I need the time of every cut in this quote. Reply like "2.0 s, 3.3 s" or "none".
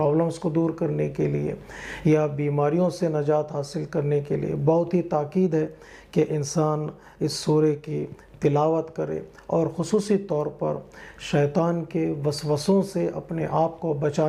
none